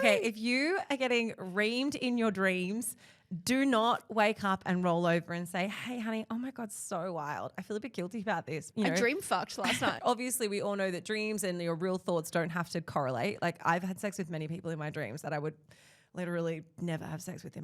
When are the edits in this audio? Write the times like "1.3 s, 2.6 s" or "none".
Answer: 8.6 s, 10.0 s